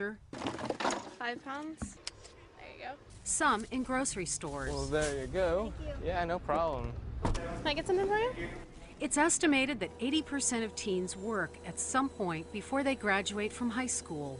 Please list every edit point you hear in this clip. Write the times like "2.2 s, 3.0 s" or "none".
6.9 s